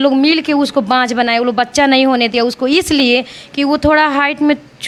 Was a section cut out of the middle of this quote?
no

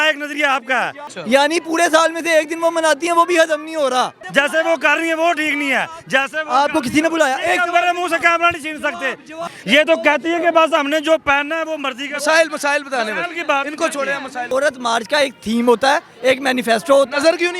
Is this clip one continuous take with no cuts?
no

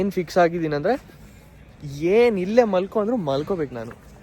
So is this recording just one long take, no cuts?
yes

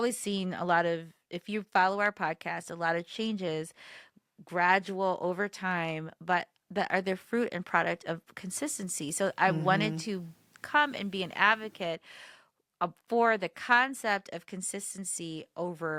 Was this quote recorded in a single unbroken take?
yes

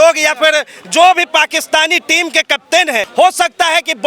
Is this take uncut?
no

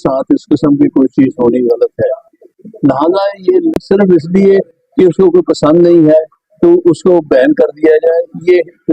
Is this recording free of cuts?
no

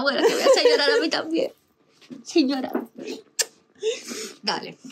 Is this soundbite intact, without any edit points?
yes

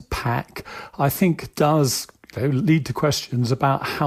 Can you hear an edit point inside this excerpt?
no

